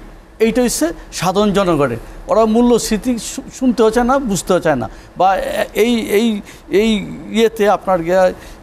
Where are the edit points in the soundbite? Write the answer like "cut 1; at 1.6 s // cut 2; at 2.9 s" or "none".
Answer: none

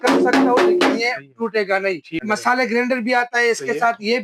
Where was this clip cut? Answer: cut 1; at 2.2 s

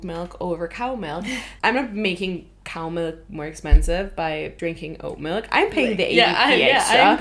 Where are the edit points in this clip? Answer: cut 1; at 1.5 s // cut 2; at 4.5 s

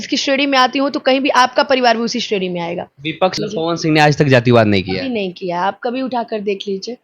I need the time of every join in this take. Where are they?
cut 1; at 3.4 s

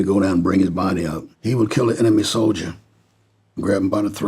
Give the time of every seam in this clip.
cut 1; at 1.3 s

